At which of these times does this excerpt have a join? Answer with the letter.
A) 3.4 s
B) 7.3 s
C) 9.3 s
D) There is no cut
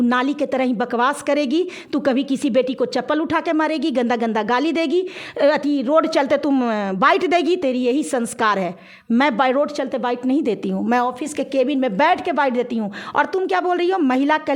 D